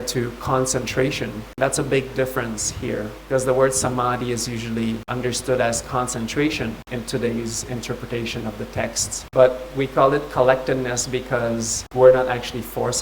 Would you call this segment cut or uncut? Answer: cut